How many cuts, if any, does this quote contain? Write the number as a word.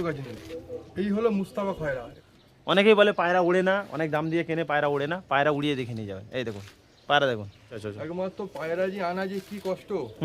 two